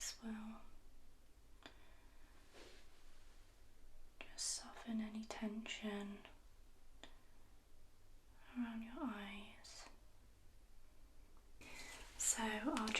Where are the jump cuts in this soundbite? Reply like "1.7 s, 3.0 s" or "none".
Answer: 11.6 s

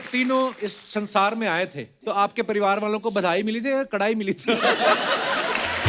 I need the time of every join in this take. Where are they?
1.9 s

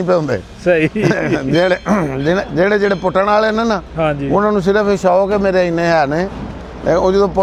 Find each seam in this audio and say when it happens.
none

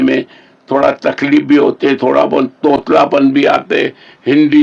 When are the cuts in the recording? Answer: none

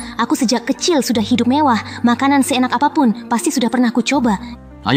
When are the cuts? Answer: none

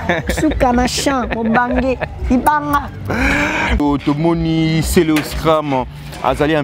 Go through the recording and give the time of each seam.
3.8 s

